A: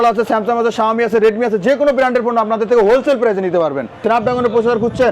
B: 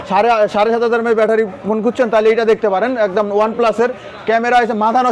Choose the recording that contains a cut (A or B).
A